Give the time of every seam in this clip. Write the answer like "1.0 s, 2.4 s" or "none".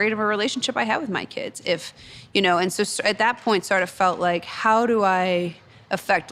none

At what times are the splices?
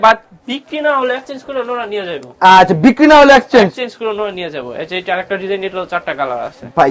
none

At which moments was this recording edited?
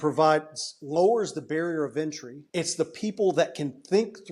2.3 s

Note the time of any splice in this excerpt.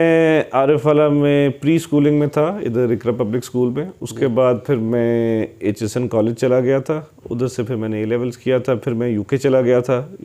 none

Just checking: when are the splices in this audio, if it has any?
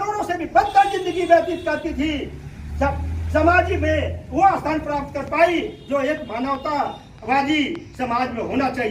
none

